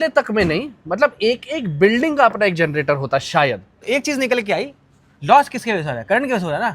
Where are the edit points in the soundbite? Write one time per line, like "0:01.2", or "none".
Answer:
0:03.7